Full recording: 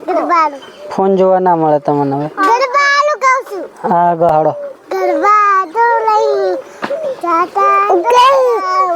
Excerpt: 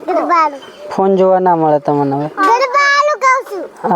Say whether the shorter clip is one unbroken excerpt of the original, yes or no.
yes